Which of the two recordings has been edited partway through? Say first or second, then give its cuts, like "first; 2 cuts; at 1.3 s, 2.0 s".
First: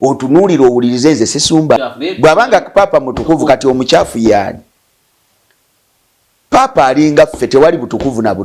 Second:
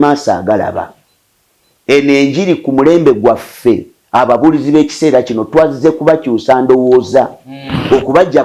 first; 1 cut; at 1.8 s